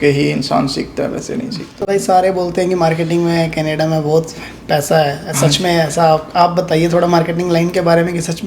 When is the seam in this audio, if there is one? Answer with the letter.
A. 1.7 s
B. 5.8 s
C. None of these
A